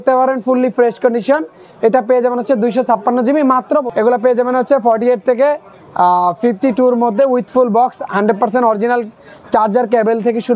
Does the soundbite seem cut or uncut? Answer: cut